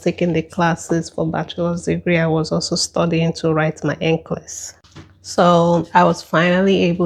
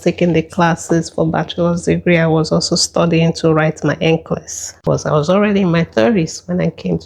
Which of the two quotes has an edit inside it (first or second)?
second